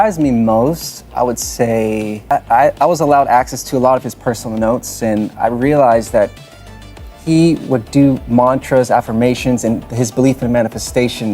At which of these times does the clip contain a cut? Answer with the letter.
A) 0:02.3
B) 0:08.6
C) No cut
A